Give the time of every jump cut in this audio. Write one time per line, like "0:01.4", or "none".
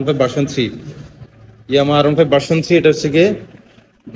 none

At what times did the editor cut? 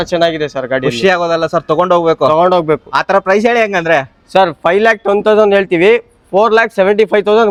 none

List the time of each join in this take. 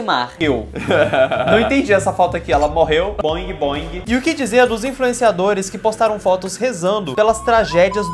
0:03.9

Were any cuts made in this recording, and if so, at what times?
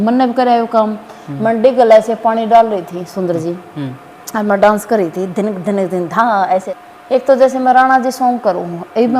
0:06.6

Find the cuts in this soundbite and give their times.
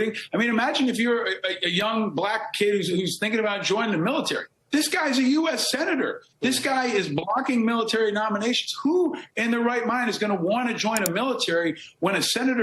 none

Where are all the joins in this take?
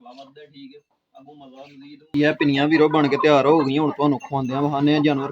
0:02.1

